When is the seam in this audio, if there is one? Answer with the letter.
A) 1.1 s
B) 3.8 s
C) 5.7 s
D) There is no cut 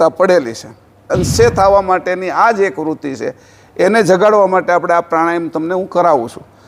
A